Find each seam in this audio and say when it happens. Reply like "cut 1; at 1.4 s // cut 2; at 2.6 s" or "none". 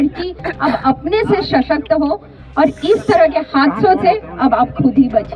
none